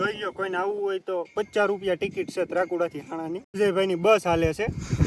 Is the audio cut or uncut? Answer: cut